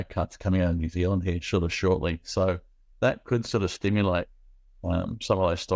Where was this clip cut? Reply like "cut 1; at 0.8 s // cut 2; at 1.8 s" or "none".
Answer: none